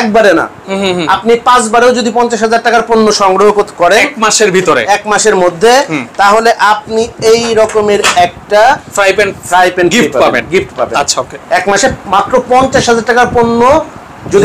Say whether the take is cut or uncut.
uncut